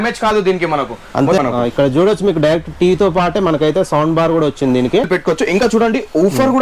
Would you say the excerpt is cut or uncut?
cut